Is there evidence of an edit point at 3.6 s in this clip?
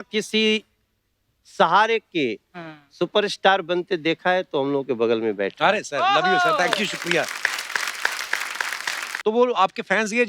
no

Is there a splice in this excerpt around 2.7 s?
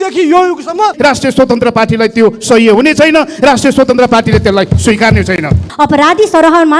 no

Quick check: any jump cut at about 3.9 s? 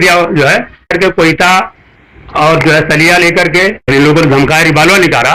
yes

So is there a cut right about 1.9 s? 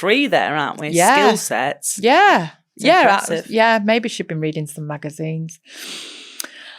no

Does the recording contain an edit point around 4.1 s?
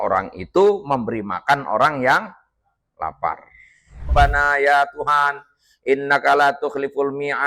yes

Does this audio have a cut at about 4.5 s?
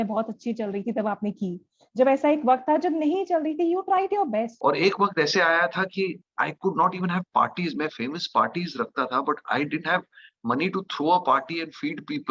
yes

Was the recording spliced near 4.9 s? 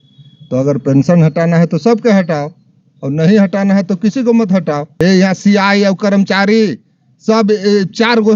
yes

